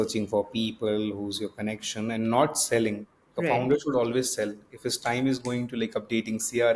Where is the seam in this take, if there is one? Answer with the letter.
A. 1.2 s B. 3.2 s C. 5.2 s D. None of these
D